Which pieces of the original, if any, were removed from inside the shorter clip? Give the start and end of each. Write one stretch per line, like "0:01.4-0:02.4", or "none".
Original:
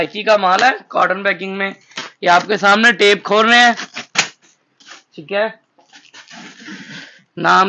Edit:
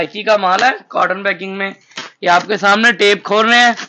none